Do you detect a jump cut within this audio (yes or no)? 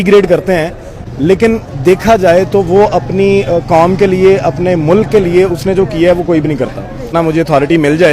yes